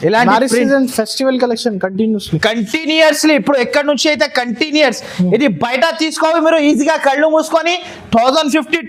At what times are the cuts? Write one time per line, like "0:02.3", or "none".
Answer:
none